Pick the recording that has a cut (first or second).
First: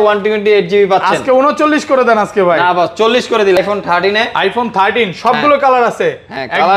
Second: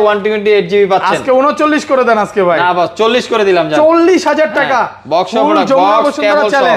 first